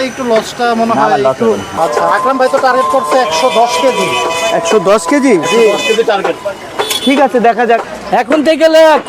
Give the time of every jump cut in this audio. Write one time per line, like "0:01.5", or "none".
0:01.7
0:07.9